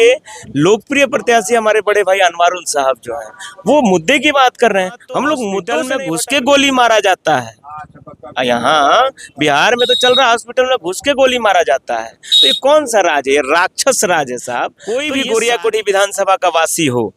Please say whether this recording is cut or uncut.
cut